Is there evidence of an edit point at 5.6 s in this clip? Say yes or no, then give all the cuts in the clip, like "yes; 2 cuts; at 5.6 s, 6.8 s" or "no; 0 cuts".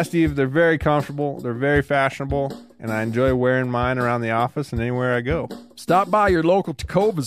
yes; 1 cut; at 5.6 s